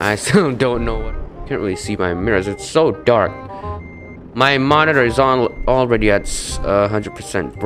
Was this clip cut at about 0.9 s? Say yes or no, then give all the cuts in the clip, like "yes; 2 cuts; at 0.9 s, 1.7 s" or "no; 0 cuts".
yes; 1 cut; at 0.9 s